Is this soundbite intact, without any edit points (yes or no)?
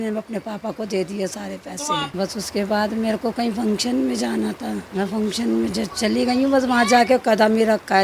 no